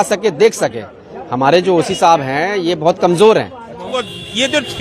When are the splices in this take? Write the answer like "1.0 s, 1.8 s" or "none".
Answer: 3.9 s